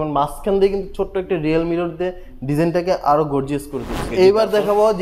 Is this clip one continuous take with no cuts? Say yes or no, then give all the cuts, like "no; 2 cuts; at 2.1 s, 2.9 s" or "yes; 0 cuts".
no; 1 cut; at 4.0 s